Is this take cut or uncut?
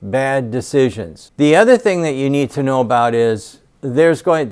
uncut